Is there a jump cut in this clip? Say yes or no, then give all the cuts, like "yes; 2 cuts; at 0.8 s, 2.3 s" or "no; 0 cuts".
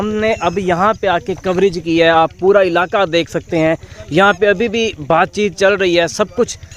no; 0 cuts